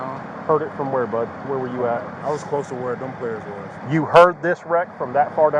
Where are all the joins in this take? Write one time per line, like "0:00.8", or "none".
0:02.2
0:03.7